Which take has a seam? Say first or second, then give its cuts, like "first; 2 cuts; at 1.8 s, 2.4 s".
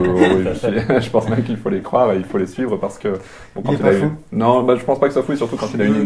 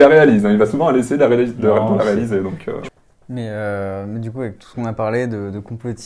second; 1 cut; at 2.9 s